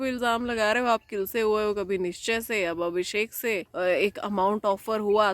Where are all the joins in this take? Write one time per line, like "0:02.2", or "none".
0:03.7